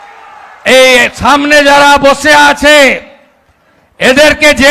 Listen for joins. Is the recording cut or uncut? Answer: uncut